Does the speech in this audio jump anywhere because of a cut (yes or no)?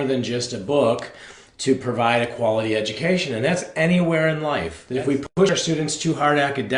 yes